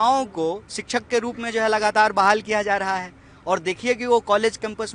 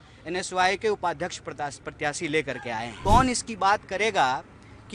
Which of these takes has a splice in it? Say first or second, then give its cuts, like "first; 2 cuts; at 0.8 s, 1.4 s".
second; 1 cut; at 2.9 s